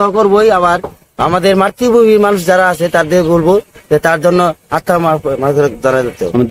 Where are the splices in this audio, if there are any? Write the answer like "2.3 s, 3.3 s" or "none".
none